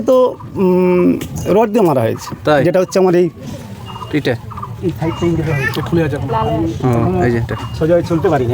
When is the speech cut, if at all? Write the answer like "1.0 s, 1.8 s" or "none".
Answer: none